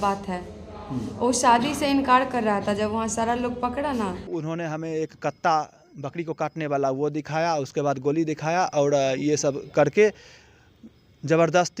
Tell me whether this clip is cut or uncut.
cut